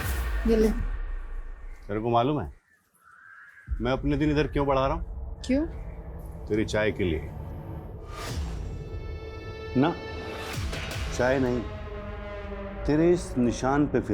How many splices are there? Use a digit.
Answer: 1